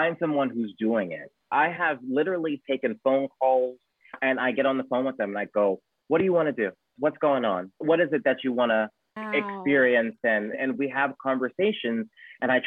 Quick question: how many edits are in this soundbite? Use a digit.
2